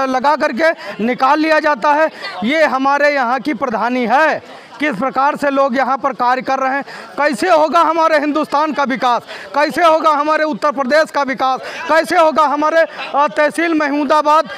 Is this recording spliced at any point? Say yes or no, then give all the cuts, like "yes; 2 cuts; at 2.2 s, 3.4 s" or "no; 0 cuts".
no; 0 cuts